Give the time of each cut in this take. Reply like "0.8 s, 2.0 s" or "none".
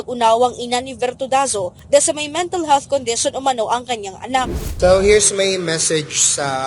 4.6 s